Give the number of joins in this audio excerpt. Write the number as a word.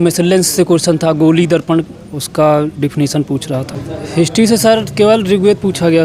one